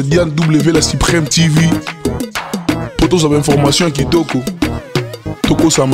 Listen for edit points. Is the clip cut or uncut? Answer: uncut